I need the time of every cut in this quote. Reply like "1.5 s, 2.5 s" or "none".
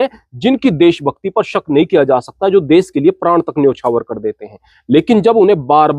none